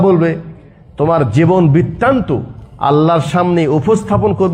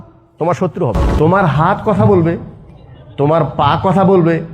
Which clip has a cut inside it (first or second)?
second